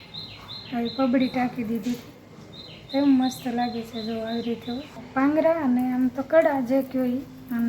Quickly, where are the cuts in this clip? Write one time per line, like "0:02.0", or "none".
0:05.0